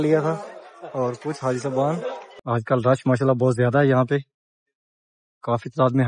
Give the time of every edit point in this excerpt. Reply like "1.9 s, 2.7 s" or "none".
2.3 s

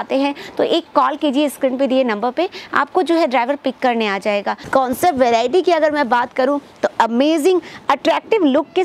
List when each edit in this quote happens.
4.6 s

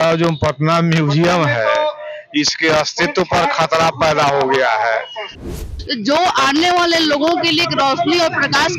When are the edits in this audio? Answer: 5.4 s

